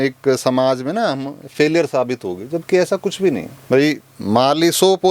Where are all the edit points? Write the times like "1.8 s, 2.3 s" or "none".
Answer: none

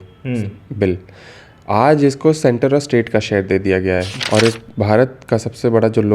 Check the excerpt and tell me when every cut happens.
4.2 s

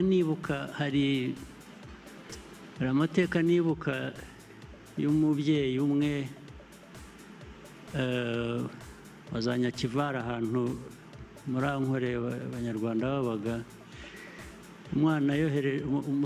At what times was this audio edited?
none

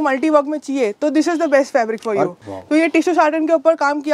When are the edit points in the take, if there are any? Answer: 2.4 s

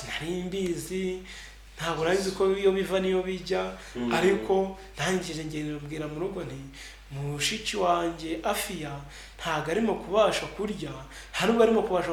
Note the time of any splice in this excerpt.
none

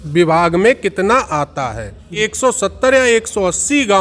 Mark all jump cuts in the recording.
2.2 s

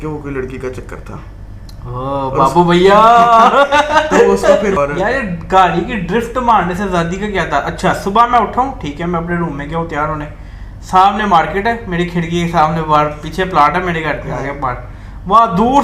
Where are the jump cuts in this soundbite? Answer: 4.8 s

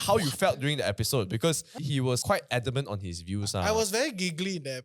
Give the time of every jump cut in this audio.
2.1 s

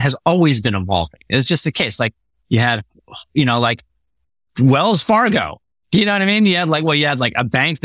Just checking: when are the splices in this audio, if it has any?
none

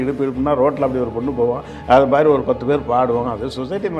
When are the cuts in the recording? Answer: none

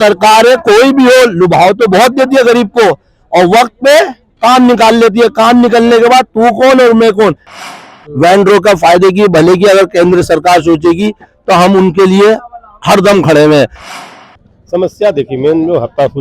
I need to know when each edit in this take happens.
7.7 s, 14.0 s

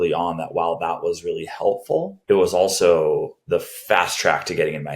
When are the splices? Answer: 2.1 s

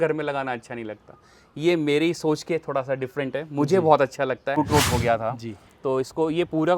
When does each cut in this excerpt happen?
4.6 s

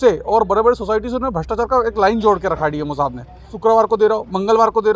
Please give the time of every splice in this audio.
3.5 s

